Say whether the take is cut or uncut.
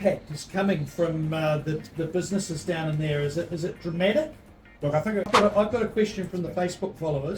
cut